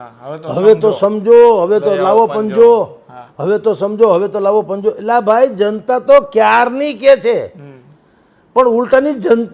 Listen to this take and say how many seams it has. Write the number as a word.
zero